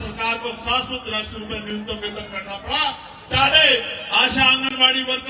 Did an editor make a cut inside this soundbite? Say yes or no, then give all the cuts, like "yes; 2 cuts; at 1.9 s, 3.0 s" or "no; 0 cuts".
no; 0 cuts